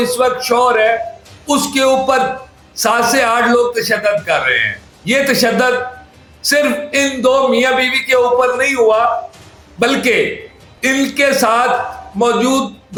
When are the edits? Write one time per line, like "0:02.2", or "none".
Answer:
none